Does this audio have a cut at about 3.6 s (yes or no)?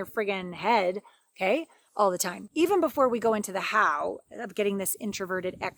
no